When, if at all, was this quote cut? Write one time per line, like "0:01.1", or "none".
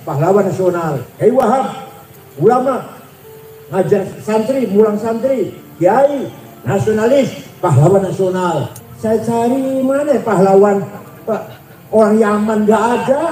0:01.0
0:08.8